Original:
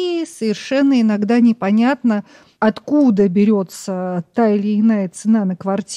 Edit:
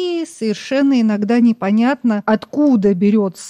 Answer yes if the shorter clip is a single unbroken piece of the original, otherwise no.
no